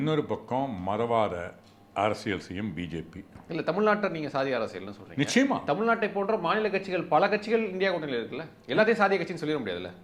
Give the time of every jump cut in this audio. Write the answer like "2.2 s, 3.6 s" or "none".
3.3 s